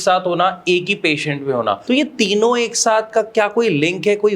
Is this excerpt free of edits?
no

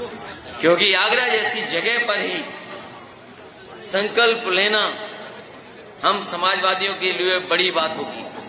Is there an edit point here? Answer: no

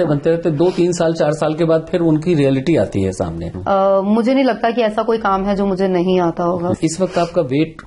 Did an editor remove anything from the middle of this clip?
yes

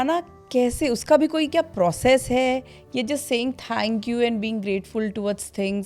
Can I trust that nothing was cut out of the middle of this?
yes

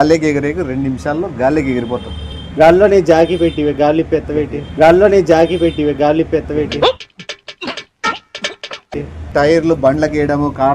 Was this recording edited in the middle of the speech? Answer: yes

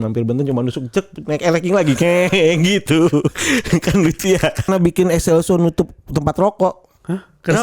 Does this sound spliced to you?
yes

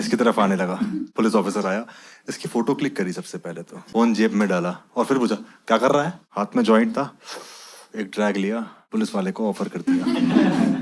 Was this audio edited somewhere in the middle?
yes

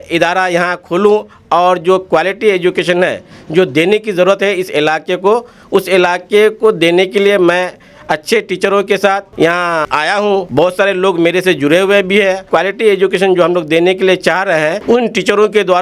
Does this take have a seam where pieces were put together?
no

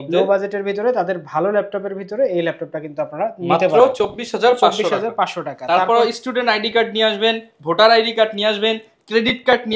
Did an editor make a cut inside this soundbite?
no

